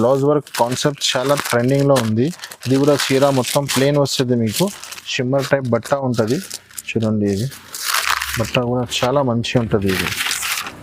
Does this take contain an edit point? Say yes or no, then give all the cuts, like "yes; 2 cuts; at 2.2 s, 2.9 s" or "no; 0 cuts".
no; 0 cuts